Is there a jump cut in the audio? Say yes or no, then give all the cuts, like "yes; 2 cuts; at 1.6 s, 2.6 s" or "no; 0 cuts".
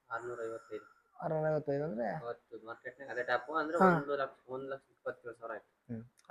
no; 0 cuts